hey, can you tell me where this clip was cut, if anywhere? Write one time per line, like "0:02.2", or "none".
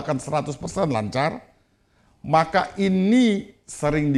none